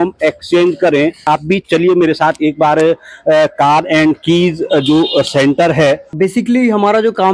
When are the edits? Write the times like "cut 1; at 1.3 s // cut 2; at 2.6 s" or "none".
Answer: cut 1; at 1.2 s // cut 2; at 6.1 s